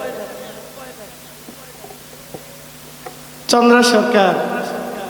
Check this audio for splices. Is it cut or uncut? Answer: uncut